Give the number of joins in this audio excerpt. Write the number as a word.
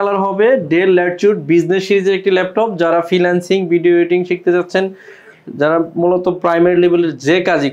zero